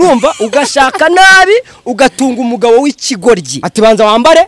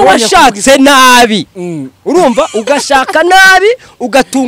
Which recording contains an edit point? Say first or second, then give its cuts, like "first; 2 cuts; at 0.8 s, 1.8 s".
first; 1 cut; at 3.6 s